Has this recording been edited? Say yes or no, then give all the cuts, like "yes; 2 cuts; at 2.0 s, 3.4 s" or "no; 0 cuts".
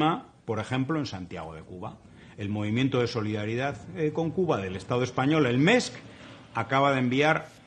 yes; 1 cut; at 1.0 s